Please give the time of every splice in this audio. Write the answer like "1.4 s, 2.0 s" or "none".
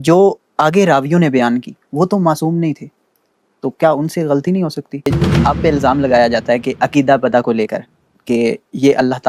5.1 s